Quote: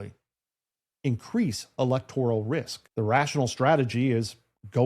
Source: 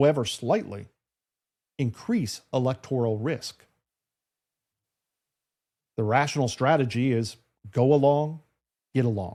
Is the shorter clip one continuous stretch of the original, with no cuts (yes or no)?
no